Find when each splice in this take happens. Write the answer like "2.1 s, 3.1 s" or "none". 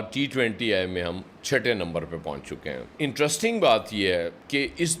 none